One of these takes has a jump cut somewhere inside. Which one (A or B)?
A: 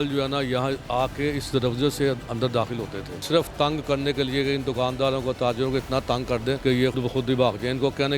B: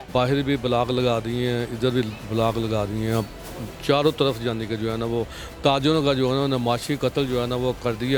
A